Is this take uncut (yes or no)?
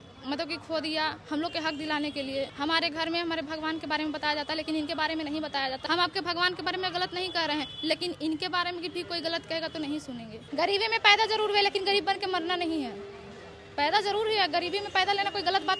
no